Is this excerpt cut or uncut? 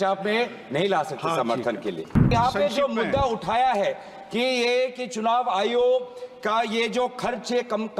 cut